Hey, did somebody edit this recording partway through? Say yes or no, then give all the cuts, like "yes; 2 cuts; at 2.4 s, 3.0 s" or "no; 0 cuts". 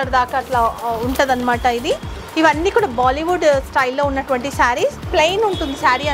yes; 1 cut; at 5.1 s